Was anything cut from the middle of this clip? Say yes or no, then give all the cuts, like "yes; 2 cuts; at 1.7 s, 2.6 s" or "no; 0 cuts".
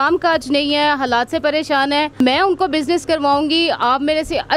yes; 1 cut; at 2.2 s